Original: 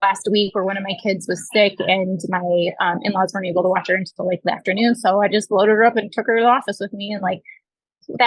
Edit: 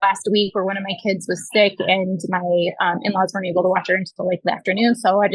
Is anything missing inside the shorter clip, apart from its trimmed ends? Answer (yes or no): no